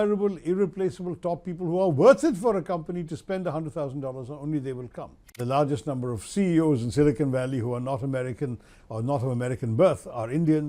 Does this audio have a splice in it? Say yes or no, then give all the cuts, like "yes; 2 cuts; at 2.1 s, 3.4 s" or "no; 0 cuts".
yes; 1 cut; at 5.4 s